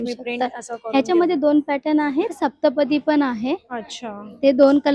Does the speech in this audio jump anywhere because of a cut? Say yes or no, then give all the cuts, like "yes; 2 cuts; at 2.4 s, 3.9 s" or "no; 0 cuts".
yes; 1 cut; at 2.4 s